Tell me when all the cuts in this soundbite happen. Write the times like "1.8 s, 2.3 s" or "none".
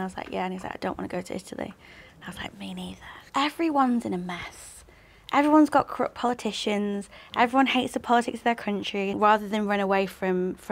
3.2 s, 9.1 s